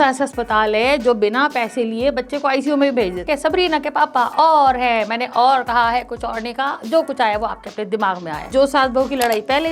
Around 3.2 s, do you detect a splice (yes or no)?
yes